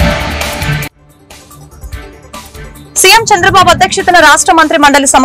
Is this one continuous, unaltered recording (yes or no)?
no